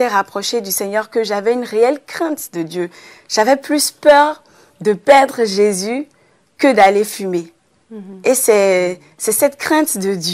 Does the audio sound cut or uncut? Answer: uncut